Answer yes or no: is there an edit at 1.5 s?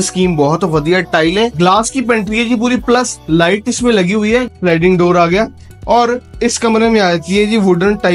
yes